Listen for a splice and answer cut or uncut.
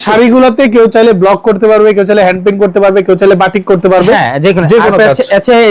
uncut